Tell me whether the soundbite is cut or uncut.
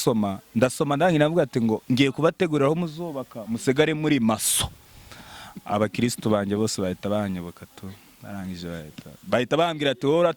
uncut